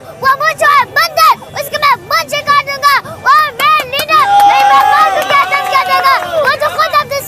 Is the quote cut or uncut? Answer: uncut